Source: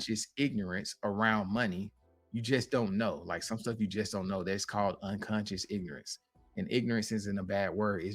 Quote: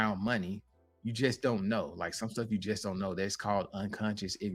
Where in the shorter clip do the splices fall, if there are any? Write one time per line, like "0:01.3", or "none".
none